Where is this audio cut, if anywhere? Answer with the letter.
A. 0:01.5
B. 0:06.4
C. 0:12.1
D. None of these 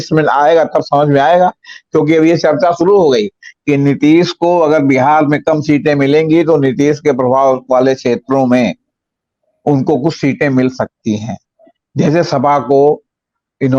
D